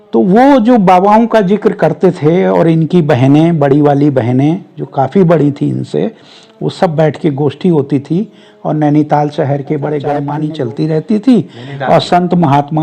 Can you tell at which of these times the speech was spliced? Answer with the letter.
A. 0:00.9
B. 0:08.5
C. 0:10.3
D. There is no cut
C